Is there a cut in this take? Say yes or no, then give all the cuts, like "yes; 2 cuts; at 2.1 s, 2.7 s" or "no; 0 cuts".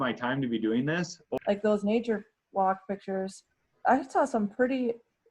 yes; 1 cut; at 1.2 s